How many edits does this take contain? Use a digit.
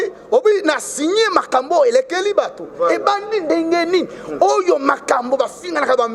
0